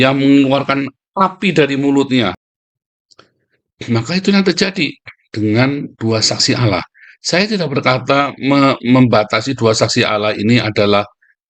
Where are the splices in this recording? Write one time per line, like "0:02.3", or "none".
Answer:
0:02.4